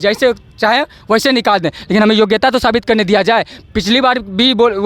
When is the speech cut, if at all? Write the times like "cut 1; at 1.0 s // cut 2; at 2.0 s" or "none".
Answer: none